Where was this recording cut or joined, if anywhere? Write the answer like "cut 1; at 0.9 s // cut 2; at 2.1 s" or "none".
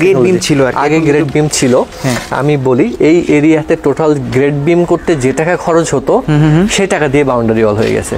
none